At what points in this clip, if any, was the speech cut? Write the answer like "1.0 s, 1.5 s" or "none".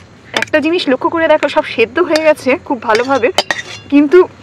none